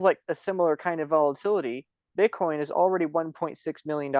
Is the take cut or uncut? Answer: uncut